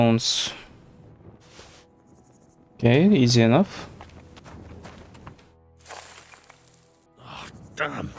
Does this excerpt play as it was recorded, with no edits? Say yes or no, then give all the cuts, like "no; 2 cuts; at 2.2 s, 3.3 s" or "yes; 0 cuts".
no; 2 cuts; at 4.3 s, 7.0 s